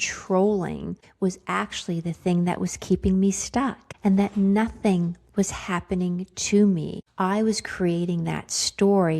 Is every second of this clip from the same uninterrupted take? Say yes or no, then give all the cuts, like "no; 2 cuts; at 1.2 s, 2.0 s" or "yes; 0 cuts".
no; 3 cuts; at 1.0 s, 3.8 s, 7.0 s